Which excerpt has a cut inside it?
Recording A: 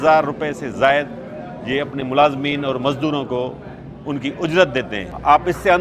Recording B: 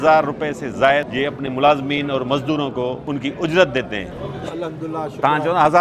B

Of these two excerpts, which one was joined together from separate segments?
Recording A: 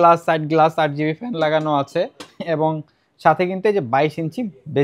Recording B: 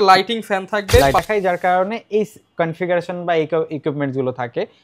B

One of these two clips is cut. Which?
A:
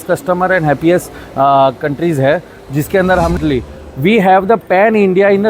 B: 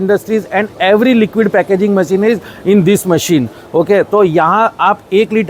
A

